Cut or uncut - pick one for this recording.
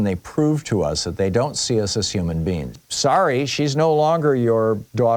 cut